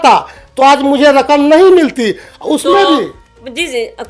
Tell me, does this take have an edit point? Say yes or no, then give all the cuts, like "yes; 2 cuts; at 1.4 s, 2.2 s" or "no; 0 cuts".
no; 0 cuts